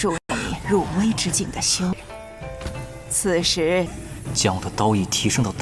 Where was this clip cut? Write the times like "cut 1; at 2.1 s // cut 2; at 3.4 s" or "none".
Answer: none